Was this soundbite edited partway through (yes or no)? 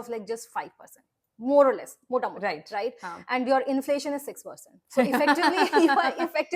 no